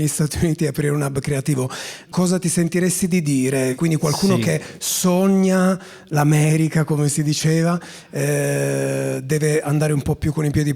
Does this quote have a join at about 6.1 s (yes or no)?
no